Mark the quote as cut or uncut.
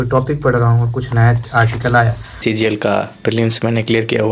cut